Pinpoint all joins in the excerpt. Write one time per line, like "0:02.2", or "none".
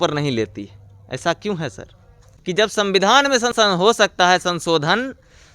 0:02.2
0:03.5